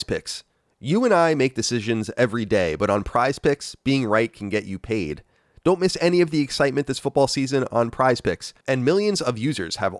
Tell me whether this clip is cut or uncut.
cut